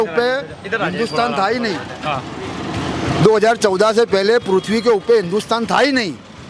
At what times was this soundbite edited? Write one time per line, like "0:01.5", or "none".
none